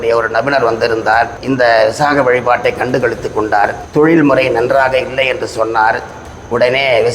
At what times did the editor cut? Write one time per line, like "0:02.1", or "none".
0:01.4
0:03.8